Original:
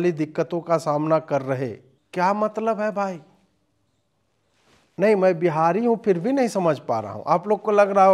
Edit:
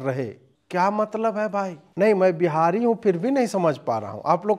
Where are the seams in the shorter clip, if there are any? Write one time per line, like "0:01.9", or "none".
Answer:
0:01.8